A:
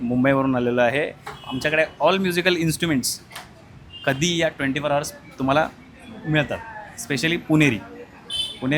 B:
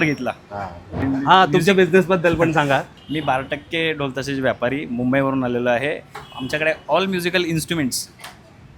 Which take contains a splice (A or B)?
B